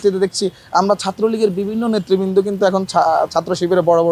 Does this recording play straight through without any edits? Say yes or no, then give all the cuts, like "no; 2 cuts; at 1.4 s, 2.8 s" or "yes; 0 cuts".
yes; 0 cuts